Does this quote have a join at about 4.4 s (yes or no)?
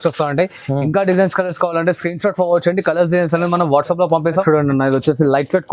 yes